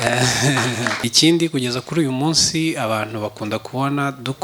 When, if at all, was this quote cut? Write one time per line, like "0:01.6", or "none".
0:01.0